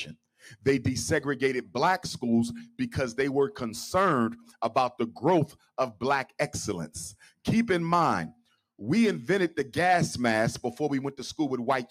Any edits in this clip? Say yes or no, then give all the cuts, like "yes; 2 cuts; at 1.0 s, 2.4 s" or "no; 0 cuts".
no; 0 cuts